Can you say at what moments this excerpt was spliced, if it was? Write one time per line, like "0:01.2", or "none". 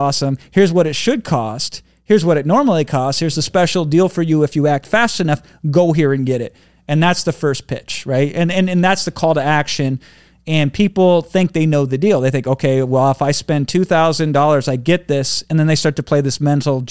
none